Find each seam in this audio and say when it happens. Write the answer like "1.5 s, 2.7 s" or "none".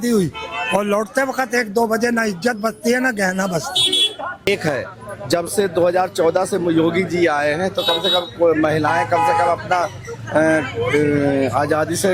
4.5 s